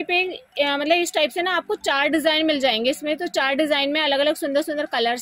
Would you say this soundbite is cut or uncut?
uncut